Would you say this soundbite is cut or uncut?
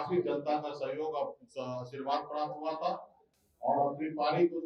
cut